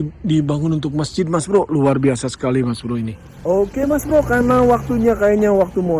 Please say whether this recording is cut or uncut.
uncut